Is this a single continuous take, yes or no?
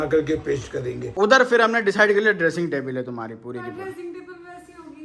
no